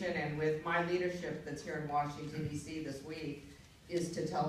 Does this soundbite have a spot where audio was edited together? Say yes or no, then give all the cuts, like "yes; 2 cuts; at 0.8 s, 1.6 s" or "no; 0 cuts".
no; 0 cuts